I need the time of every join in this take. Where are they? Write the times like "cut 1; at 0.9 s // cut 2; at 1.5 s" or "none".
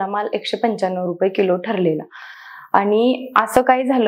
none